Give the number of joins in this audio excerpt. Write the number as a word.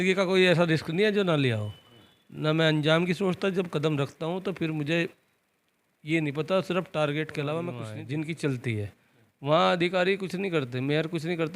one